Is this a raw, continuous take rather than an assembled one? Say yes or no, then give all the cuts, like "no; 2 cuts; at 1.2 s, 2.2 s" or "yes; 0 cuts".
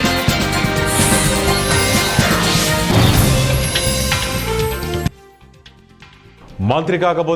no; 1 cut; at 6.4 s